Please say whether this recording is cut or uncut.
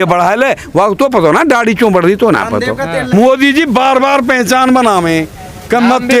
cut